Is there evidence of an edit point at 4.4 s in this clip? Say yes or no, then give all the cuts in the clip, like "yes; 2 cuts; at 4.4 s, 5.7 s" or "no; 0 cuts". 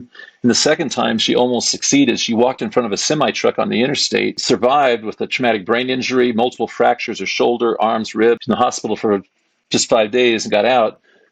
yes; 2 cuts; at 4.4 s, 8.4 s